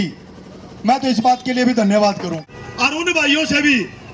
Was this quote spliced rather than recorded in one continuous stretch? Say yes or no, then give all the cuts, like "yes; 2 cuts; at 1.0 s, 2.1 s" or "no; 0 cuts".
yes; 1 cut; at 2.4 s